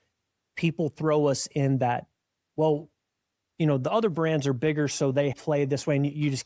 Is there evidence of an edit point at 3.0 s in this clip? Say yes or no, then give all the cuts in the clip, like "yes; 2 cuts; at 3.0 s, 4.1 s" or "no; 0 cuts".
no; 1 cut; at 5.4 s